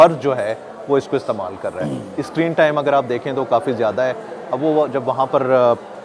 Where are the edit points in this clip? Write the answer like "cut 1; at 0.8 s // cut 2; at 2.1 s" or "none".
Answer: none